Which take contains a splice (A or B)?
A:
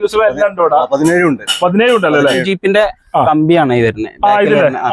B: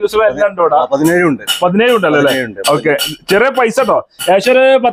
A